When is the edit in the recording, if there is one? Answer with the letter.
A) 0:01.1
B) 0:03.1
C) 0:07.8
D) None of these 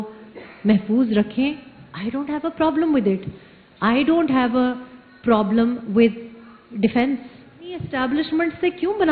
C